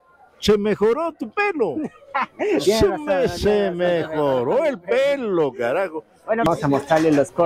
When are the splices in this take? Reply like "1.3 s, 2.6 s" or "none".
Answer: 6.5 s